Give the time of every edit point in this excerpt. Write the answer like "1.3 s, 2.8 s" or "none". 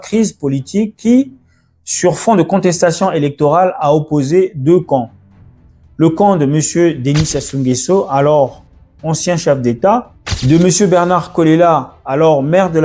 none